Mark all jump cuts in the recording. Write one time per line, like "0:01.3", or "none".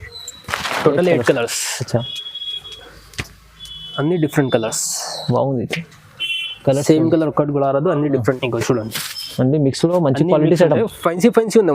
0:08.4